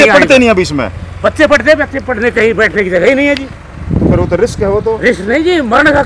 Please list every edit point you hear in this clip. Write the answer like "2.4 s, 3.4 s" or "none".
none